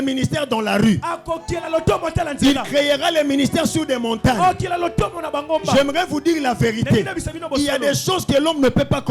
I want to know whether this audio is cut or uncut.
uncut